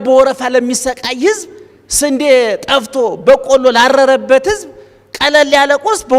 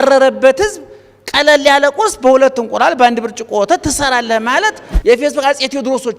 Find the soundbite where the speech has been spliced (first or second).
second